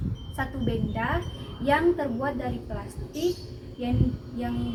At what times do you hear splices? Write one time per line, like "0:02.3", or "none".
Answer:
none